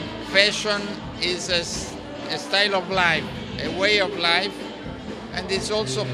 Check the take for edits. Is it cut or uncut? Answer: uncut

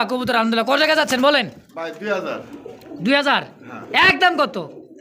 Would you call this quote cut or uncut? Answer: uncut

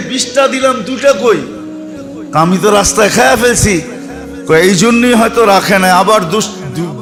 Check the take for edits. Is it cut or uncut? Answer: uncut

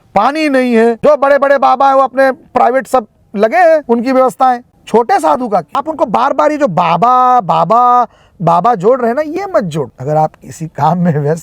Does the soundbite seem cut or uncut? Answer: cut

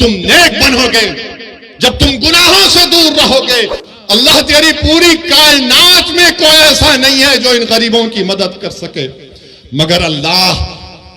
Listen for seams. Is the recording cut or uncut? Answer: cut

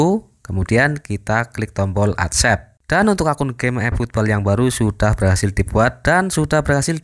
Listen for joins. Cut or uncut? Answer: cut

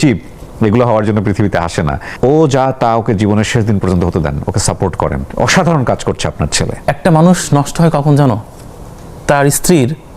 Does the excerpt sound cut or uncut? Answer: cut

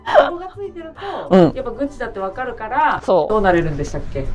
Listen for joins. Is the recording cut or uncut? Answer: uncut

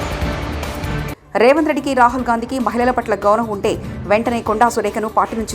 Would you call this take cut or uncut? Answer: cut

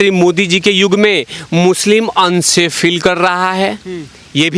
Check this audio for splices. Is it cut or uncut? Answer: uncut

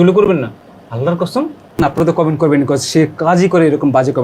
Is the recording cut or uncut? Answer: cut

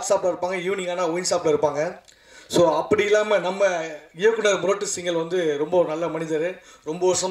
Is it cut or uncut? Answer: uncut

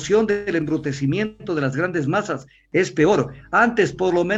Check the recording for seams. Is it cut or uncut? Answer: uncut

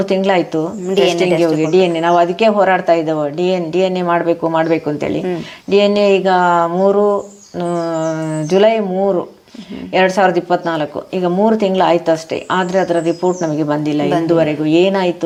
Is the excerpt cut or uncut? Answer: uncut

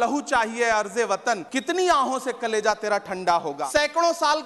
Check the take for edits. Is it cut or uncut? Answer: cut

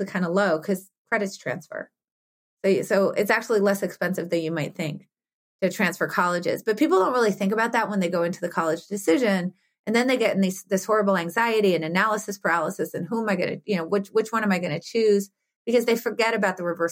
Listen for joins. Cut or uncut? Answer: uncut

